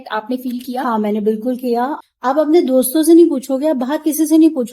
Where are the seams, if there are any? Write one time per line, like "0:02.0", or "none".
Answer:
0:02.0